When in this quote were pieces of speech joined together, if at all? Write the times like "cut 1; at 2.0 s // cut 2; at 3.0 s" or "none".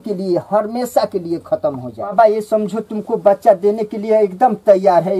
cut 1; at 2.1 s